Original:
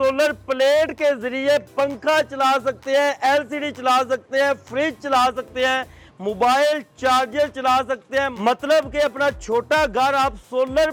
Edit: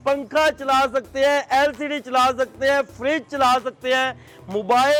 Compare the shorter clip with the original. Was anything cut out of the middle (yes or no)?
no